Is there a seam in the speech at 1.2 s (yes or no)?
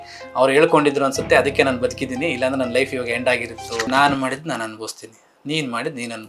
no